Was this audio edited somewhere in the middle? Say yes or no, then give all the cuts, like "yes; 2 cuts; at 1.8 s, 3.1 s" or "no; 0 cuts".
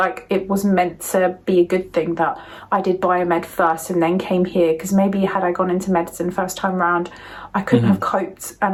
no; 0 cuts